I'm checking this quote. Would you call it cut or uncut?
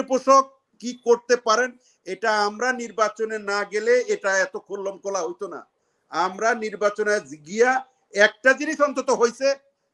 uncut